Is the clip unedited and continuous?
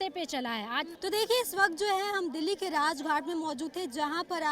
yes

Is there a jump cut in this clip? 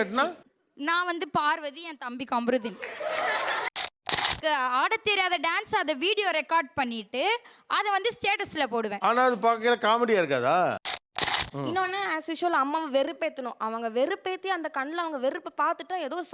yes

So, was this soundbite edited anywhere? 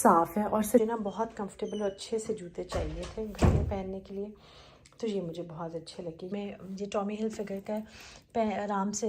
yes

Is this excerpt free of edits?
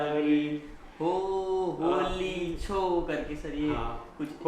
yes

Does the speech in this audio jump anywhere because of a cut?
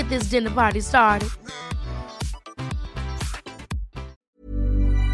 yes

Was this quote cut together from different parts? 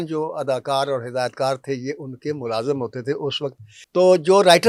yes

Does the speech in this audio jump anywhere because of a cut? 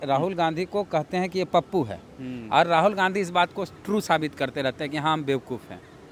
no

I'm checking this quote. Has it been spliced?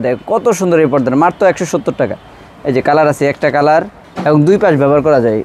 yes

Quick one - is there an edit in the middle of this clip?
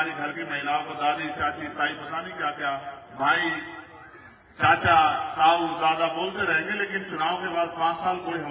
no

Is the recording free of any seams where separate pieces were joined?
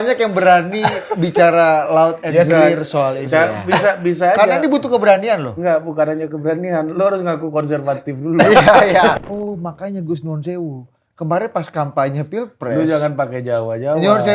no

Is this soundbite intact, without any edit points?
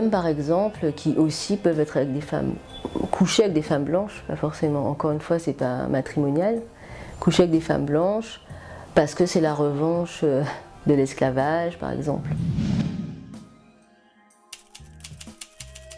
yes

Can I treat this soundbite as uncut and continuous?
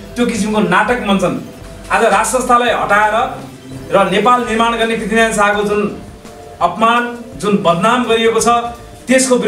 no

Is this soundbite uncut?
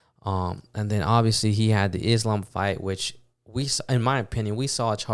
yes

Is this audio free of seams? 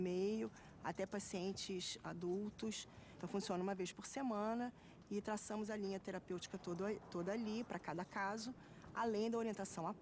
yes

